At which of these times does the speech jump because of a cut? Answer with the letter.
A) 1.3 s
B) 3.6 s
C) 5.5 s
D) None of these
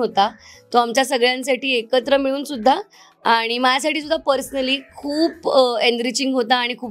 D